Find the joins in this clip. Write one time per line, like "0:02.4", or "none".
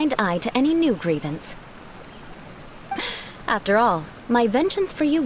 none